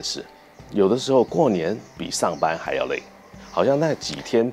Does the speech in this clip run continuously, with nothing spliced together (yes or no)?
no